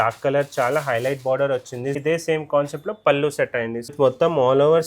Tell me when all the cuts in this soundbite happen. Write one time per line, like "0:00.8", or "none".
0:02.0
0:03.9

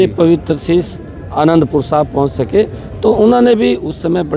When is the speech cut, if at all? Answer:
none

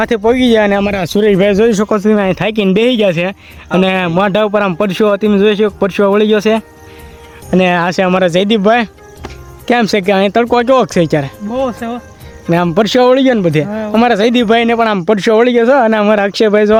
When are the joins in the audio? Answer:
none

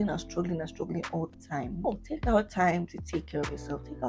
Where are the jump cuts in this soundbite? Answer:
0:01.9

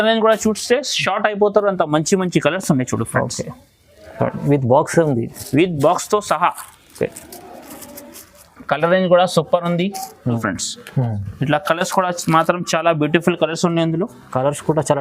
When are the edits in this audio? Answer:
0:10.4

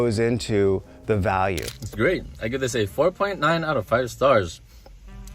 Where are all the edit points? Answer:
0:01.8

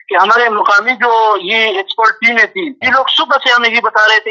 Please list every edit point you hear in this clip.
0:02.9

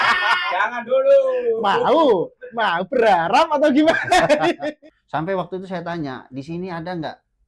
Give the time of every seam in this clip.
0:04.6

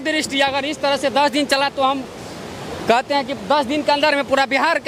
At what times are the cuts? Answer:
none

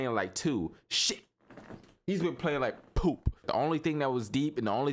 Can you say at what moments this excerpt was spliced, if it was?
0:03.4

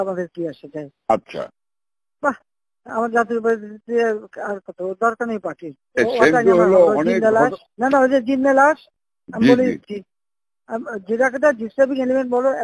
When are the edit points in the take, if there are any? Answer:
0:05.7
0:07.7

